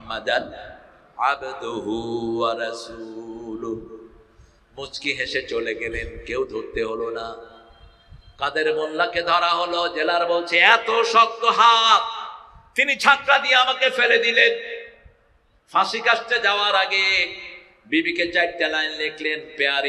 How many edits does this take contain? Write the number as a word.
zero